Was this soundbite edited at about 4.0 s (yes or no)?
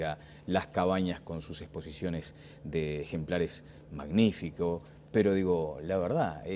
yes